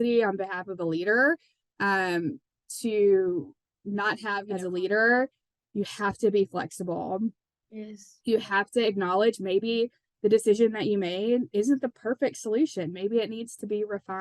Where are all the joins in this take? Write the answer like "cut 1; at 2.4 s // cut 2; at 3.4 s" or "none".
cut 1; at 4.4 s